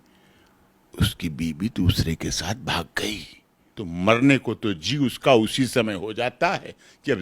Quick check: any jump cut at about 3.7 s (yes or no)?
yes